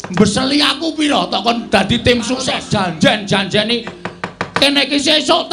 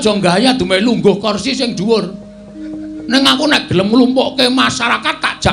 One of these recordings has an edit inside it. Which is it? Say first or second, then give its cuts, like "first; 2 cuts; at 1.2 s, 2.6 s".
first; 1 cut; at 2.6 s